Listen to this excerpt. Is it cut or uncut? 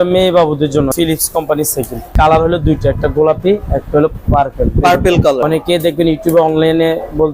cut